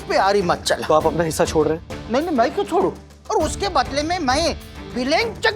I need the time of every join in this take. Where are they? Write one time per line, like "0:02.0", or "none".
0:00.8
0:03.1